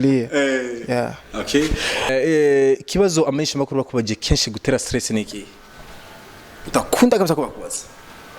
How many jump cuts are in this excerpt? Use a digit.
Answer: 1